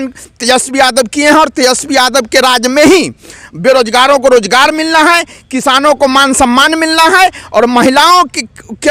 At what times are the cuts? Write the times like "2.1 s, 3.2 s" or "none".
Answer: none